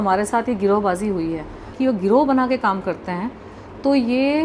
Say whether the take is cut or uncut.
cut